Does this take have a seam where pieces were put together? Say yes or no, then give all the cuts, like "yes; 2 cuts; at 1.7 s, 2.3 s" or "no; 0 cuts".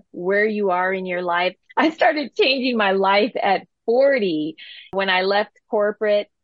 yes; 2 cuts; at 1.6 s, 4.9 s